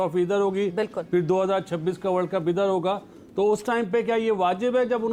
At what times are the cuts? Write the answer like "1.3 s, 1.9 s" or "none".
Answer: none